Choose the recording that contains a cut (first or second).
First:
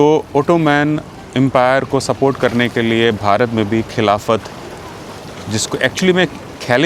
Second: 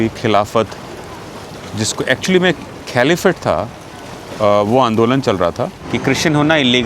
second